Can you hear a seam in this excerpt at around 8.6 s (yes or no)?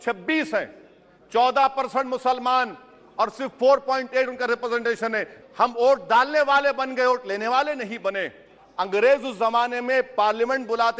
yes